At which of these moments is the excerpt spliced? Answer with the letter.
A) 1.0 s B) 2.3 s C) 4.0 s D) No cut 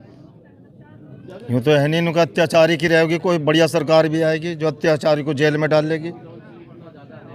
D